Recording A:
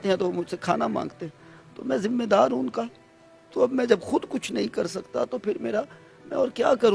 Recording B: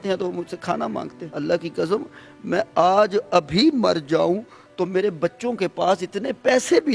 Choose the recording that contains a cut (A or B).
B